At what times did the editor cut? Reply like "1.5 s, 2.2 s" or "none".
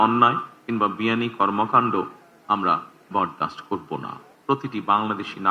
4.3 s